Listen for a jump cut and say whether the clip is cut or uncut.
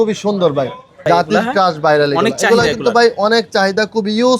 cut